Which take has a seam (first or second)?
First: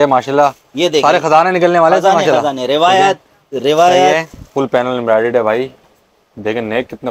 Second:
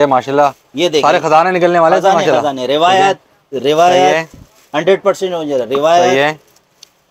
first